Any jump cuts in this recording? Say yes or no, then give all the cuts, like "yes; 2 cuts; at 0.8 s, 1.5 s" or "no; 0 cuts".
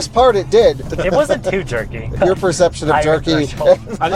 yes; 2 cuts; at 0.9 s, 2.1 s